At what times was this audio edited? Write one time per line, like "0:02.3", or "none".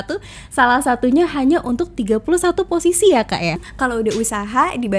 0:03.7